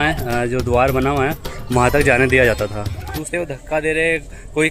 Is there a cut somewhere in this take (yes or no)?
yes